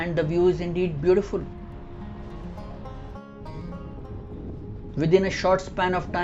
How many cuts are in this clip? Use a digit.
0